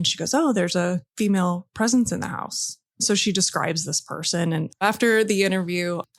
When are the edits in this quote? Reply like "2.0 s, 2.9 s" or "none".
4.8 s